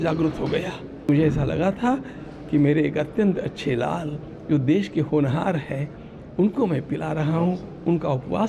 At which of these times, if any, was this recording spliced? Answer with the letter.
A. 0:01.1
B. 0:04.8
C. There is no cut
A